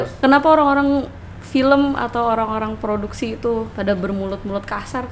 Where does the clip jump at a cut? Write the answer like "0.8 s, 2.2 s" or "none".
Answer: none